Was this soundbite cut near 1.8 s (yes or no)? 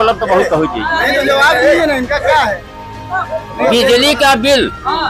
no